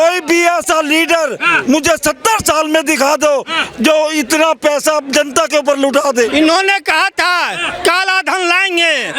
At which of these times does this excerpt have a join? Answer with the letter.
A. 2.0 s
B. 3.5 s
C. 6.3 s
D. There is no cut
C